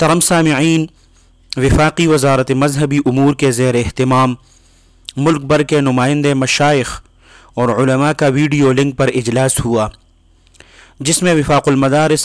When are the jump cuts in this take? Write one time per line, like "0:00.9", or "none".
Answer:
none